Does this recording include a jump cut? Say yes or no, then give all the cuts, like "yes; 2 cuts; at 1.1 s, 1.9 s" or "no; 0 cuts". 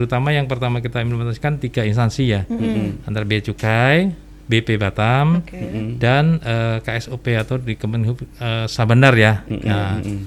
no; 0 cuts